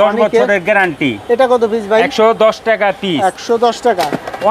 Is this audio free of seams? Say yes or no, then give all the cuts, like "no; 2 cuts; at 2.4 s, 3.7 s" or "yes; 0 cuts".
yes; 0 cuts